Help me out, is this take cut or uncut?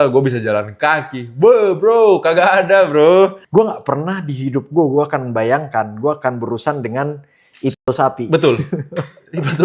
cut